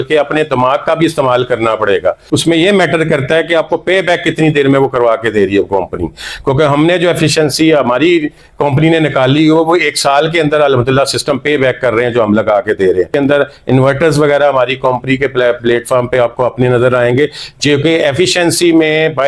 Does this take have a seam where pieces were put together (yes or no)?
no